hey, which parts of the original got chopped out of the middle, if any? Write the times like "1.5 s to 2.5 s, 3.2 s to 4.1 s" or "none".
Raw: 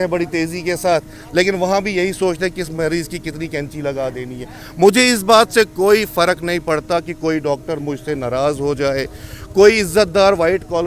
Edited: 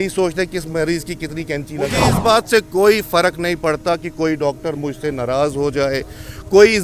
4.2 s to 5.2 s